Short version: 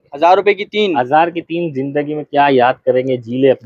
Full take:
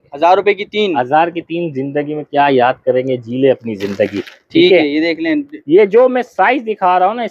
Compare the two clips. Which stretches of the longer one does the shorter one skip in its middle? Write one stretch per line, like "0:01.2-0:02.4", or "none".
none